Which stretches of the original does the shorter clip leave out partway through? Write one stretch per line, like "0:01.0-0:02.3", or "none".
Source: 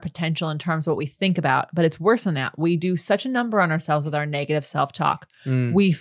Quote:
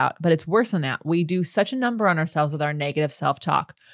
none